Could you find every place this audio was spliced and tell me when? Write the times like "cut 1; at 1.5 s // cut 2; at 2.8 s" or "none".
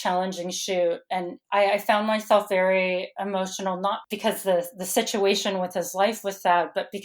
cut 1; at 4.1 s